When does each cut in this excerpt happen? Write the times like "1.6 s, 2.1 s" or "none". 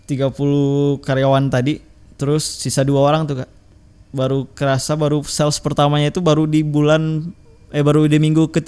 3.6 s